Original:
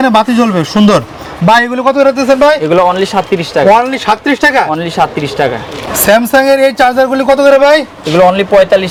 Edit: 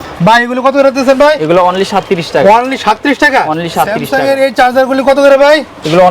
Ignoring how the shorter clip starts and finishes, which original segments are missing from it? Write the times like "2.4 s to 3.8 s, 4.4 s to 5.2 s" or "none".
5.3 s to 6.3 s